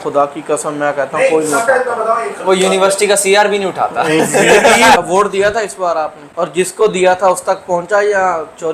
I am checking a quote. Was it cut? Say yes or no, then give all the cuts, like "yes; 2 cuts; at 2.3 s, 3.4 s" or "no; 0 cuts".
yes; 2 cuts; at 5.0 s, 6.2 s